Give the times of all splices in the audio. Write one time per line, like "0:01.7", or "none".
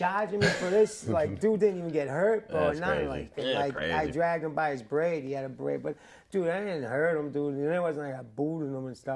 0:03.3